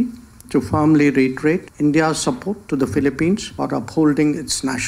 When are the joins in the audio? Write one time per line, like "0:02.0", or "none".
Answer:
0:01.7
0:03.5